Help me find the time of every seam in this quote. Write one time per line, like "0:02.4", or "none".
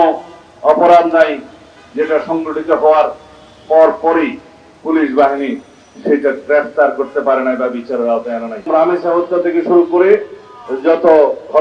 0:08.7